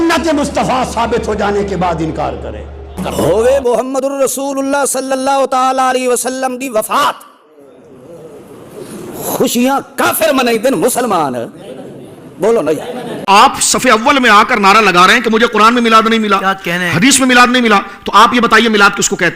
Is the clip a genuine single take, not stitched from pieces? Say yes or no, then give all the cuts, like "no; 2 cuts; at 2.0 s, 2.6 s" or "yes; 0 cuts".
no; 2 cuts; at 2.9 s, 13.3 s